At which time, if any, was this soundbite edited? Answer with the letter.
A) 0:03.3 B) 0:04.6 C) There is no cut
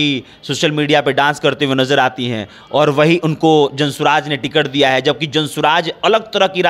C